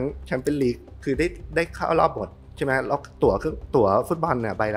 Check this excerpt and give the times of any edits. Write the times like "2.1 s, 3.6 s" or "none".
none